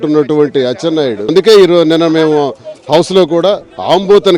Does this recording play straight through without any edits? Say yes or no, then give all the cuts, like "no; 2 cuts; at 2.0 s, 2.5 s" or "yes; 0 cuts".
no; 1 cut; at 1.3 s